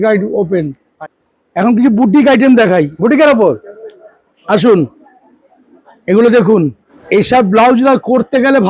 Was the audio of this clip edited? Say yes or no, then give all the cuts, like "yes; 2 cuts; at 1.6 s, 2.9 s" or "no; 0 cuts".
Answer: yes; 2 cuts; at 0.9 s, 6.9 s